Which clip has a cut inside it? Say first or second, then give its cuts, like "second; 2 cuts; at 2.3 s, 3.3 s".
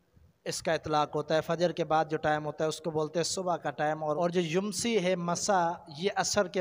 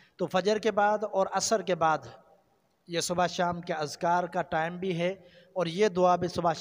first; 1 cut; at 4.2 s